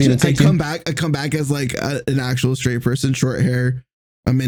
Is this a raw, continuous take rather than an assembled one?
yes; 0 cuts

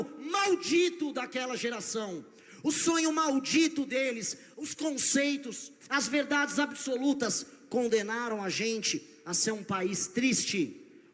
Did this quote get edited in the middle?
no; 0 cuts

